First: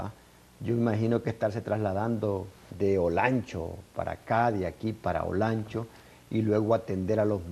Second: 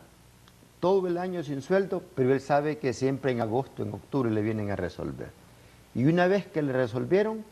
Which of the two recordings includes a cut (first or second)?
second